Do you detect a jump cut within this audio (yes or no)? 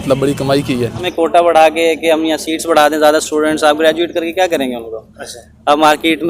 yes